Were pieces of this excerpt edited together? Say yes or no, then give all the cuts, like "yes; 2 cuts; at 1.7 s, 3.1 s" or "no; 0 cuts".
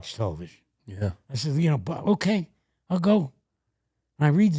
no; 0 cuts